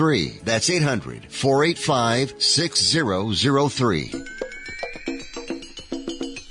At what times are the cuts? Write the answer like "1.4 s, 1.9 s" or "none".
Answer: 4.1 s